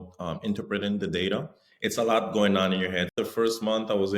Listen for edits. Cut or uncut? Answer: cut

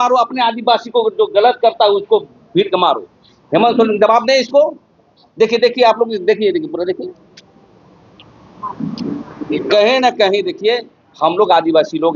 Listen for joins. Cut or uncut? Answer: uncut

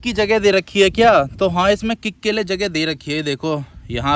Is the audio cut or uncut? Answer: uncut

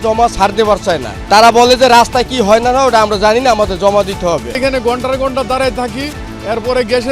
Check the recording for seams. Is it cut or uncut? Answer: cut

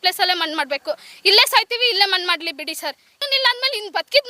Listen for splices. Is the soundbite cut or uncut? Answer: cut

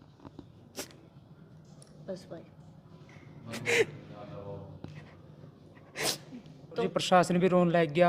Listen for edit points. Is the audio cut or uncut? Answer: cut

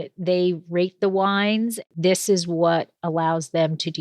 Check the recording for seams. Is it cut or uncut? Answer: cut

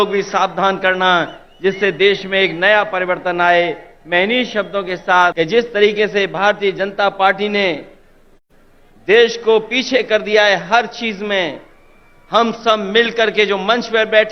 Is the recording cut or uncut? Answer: cut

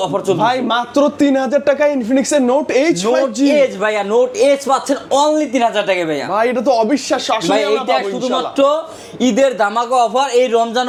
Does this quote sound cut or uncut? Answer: uncut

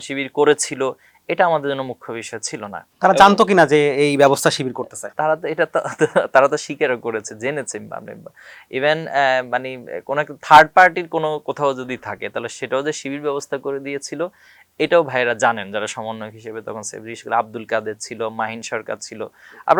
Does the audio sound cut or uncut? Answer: uncut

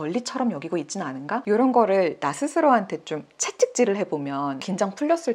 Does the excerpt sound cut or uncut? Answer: uncut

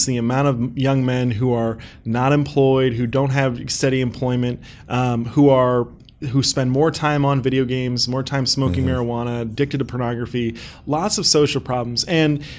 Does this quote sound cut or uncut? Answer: uncut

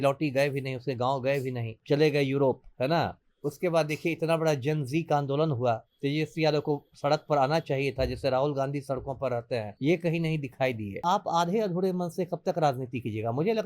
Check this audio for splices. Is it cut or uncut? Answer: cut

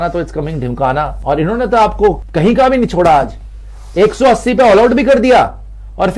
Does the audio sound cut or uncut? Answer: cut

